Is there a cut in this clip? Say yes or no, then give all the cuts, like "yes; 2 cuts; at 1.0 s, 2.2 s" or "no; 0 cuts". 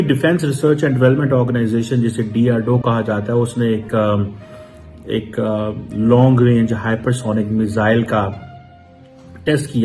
no; 0 cuts